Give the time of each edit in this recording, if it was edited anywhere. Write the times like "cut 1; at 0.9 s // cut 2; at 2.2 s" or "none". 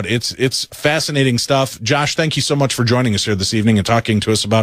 cut 1; at 2.5 s